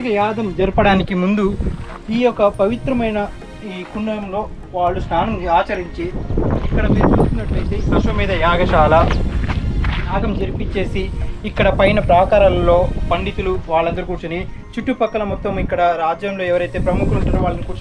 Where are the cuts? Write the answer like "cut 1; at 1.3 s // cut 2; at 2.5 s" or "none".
cut 1; at 10.2 s